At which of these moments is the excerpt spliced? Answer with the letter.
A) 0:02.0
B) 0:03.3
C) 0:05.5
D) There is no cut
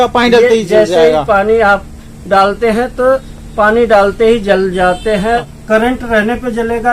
C